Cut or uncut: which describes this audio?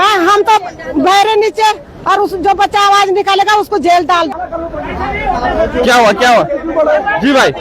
cut